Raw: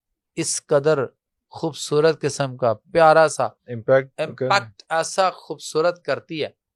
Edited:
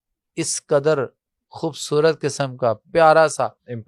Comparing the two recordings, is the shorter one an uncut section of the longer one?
yes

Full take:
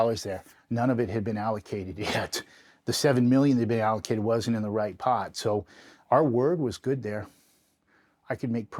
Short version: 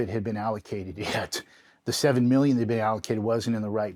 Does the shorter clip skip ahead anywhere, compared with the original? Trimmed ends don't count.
no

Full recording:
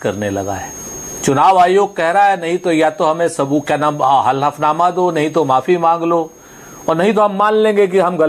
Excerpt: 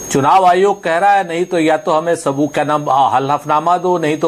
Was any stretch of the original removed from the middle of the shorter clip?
no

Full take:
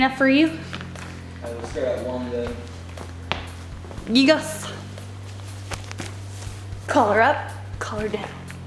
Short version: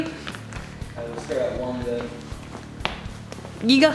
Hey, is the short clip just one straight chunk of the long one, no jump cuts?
yes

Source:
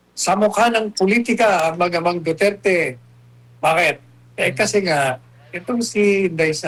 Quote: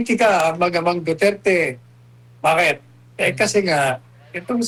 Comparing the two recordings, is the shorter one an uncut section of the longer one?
yes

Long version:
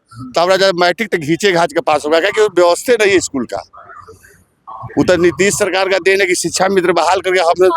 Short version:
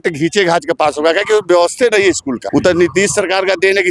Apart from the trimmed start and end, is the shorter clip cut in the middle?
yes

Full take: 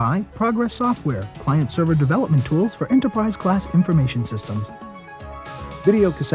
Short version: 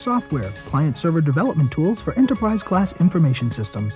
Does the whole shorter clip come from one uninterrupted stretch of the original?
yes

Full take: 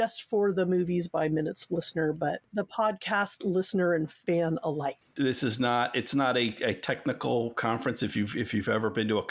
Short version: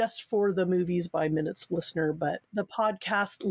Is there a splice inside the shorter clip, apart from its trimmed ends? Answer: no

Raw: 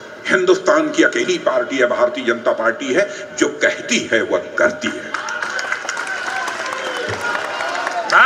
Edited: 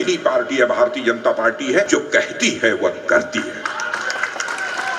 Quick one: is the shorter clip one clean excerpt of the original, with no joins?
no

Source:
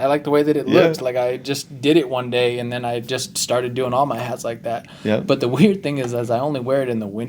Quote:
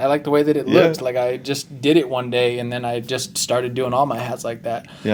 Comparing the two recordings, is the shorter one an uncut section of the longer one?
yes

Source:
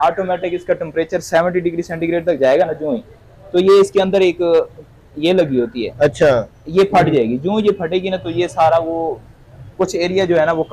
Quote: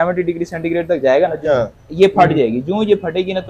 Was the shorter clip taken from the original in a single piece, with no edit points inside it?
no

